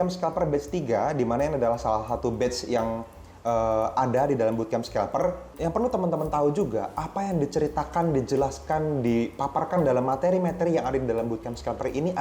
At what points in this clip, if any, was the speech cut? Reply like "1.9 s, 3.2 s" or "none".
5.5 s